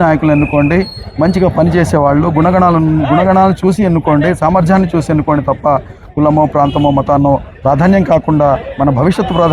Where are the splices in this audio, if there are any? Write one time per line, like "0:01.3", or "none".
none